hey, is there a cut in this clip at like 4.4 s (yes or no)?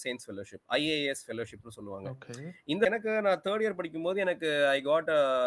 no